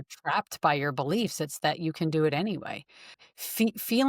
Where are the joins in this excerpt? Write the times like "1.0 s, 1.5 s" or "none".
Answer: 3.2 s